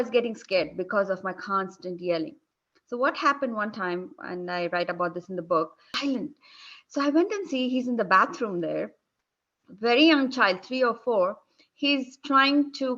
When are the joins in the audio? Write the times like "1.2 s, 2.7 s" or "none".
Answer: 5.9 s

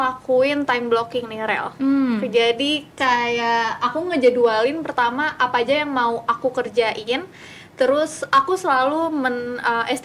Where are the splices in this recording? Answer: none

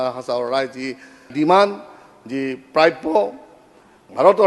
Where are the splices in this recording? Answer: 1.3 s

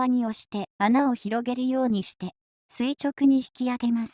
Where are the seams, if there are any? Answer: 3.0 s

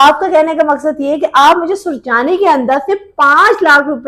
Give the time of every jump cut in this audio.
none

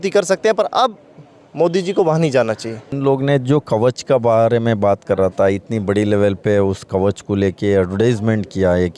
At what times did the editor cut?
2.9 s

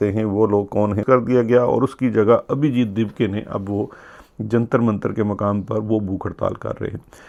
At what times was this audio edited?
none

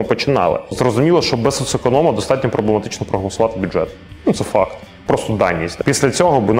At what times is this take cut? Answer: 0.8 s, 5.7 s

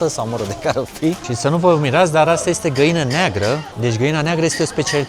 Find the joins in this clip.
1.3 s, 3.7 s

